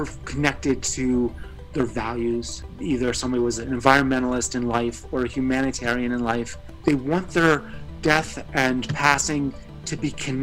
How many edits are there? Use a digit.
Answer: 2